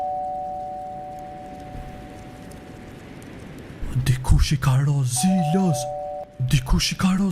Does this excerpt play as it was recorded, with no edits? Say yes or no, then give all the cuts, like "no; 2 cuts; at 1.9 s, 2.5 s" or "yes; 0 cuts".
no; 1 cut; at 6.2 s